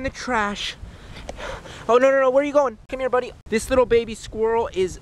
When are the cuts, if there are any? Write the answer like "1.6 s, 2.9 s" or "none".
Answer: 2.8 s